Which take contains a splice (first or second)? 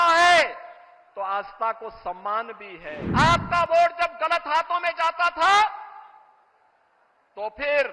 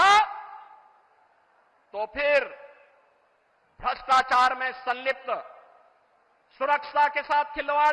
first